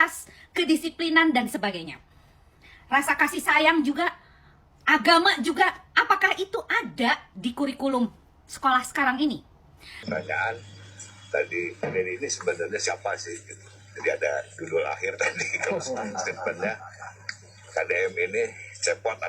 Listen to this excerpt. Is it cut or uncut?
cut